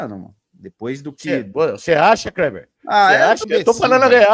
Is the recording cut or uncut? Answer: cut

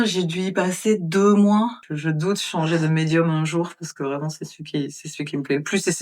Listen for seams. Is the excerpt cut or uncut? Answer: cut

